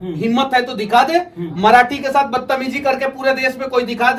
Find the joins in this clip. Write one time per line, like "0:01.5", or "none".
none